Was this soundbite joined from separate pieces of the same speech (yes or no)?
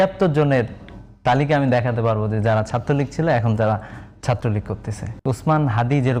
no